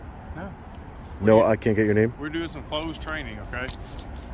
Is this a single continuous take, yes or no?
yes